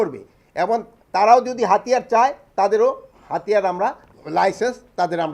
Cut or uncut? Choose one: cut